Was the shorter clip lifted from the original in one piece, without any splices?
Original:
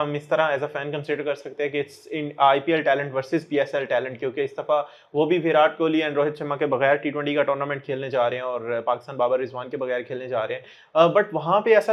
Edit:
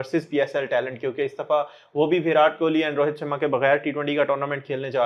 yes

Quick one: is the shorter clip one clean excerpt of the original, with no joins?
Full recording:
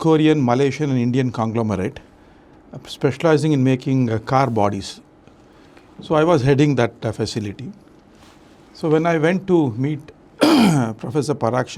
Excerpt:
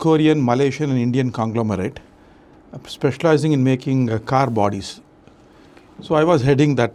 yes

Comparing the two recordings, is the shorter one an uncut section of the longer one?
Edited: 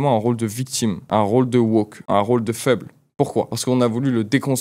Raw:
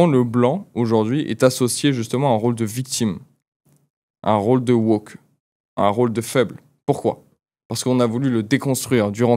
no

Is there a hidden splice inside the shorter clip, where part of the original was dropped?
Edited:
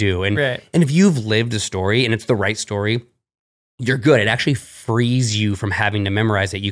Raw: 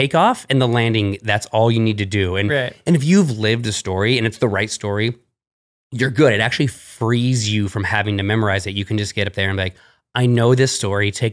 no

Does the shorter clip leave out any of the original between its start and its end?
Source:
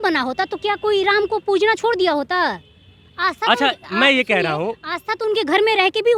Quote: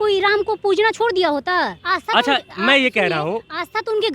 yes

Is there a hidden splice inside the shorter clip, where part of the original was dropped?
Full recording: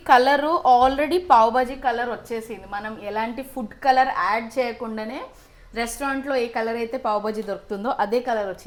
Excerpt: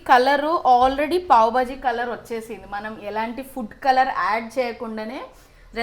no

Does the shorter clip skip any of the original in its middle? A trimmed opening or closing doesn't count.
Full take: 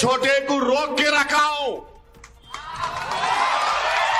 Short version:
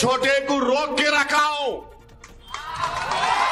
no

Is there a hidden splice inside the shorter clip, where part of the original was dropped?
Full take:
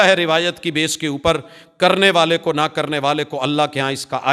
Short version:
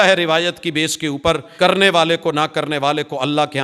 yes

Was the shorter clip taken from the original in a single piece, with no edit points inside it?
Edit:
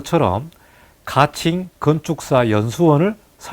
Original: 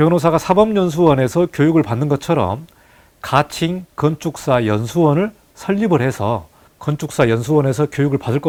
yes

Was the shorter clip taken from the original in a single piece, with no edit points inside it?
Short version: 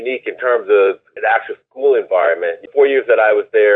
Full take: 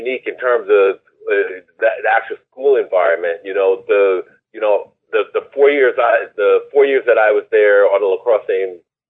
no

